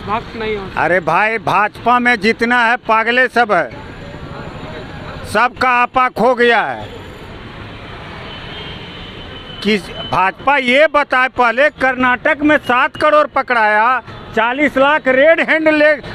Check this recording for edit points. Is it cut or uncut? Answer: uncut